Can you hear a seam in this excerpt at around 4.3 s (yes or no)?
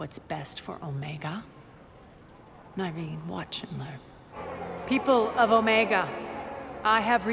yes